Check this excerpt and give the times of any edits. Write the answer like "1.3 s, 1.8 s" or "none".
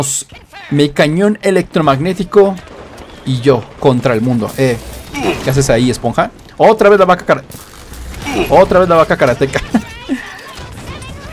none